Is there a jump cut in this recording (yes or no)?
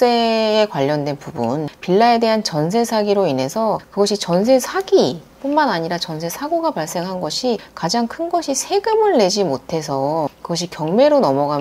no